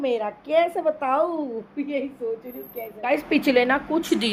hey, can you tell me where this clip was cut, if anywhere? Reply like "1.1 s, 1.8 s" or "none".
none

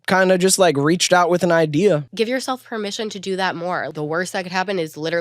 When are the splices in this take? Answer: 2.1 s, 3.9 s

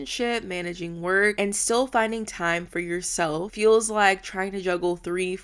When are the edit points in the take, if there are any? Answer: 1.3 s, 3.5 s

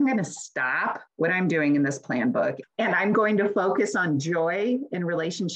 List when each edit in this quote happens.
2.6 s

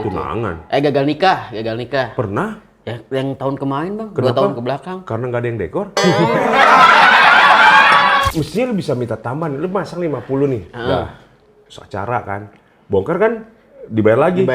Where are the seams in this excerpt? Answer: 8.3 s

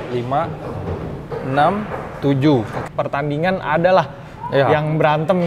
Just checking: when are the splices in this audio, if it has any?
2.8 s

